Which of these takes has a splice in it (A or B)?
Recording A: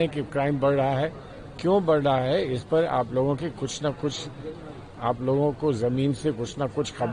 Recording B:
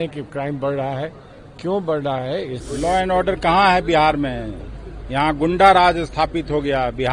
B